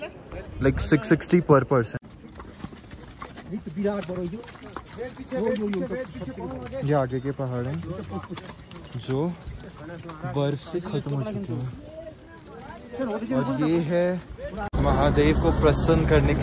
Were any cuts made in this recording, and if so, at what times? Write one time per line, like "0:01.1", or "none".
0:02.1
0:14.7